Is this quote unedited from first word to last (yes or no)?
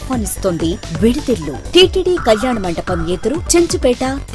no